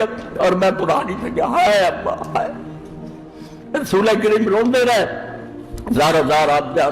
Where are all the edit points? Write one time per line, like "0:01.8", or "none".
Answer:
none